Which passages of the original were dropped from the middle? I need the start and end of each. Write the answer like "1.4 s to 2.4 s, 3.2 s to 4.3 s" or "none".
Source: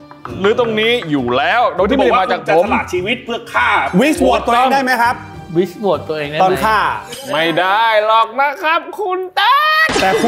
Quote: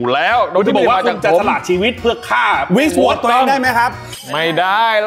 5.3 s to 7.1 s